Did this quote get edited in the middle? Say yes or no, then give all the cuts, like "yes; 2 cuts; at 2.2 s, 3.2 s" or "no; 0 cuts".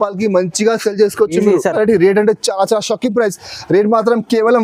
yes; 1 cut; at 1.7 s